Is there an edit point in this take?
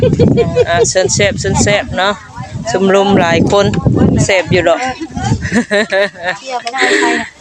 no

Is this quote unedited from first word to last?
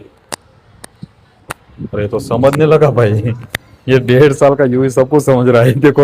yes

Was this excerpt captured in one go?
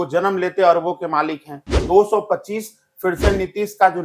no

